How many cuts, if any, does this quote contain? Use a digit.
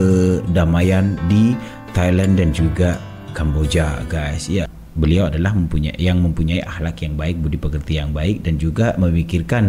1